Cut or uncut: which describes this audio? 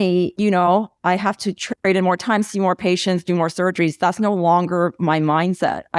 uncut